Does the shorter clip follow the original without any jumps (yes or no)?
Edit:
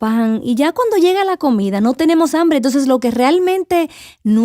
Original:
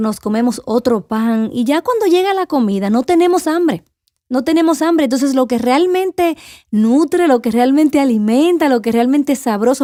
no